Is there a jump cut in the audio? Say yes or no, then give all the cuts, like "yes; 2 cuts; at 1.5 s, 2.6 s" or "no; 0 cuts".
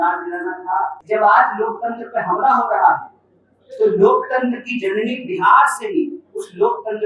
yes; 1 cut; at 1.0 s